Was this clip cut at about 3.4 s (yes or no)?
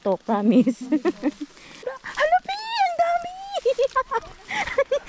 no